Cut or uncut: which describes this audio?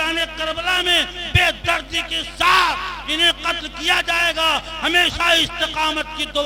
uncut